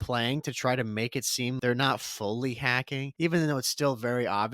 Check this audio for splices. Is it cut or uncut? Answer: cut